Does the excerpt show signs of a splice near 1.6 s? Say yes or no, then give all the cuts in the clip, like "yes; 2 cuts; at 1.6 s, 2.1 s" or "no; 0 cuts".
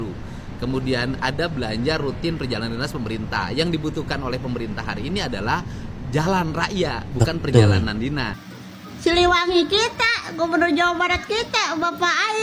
no; 1 cut; at 8.5 s